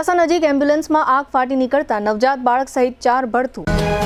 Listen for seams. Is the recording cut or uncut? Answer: uncut